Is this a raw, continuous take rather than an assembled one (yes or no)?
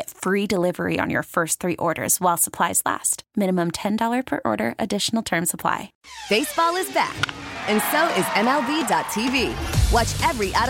no